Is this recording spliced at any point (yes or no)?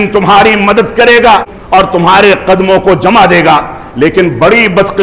yes